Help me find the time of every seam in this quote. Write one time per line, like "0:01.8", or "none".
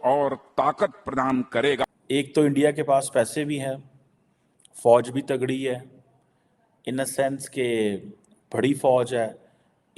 0:01.8